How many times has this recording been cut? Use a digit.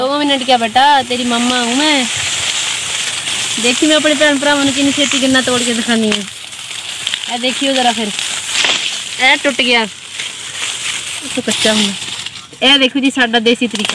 1